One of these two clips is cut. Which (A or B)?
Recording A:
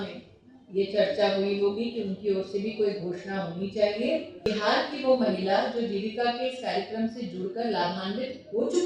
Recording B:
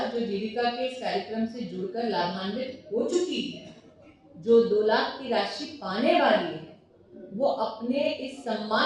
A